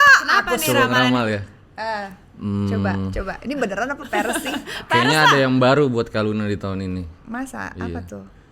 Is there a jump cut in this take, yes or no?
no